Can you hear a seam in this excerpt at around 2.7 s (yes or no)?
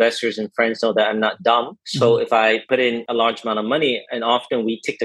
yes